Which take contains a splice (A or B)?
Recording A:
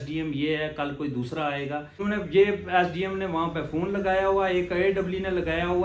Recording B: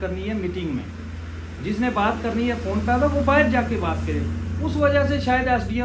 A